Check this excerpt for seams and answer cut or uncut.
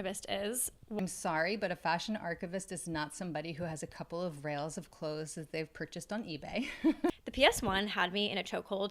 cut